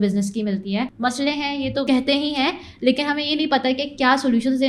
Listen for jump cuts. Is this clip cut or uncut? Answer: cut